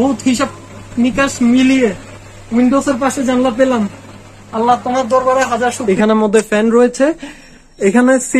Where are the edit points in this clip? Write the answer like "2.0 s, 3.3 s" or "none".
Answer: 5.8 s